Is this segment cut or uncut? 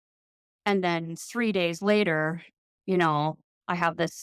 uncut